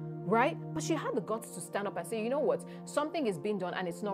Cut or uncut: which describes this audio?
uncut